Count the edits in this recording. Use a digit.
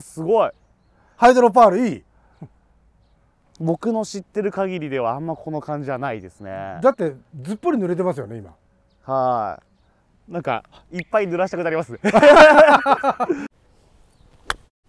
1